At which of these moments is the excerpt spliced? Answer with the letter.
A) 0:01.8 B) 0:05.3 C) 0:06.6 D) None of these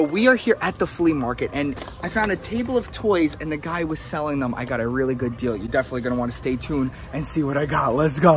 A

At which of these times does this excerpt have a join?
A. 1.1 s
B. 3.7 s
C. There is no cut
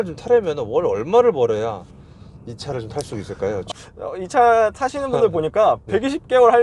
B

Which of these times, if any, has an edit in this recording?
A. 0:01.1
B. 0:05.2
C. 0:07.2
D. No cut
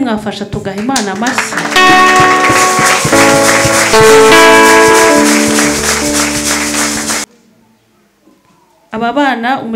C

